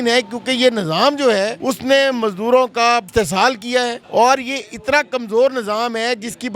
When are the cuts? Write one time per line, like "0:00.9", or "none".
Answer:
0:01.6
0:03.1
0:04.0